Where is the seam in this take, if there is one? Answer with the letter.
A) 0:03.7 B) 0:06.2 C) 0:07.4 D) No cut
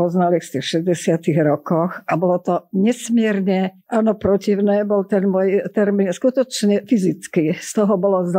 D